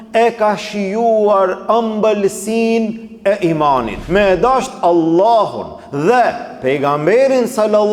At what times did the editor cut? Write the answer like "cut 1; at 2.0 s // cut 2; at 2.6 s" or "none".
cut 1; at 4.0 s